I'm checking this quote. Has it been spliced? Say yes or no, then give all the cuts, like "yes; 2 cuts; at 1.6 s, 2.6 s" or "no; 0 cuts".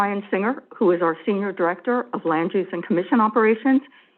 no; 0 cuts